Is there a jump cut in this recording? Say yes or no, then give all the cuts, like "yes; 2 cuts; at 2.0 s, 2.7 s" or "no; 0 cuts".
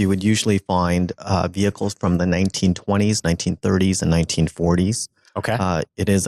no; 0 cuts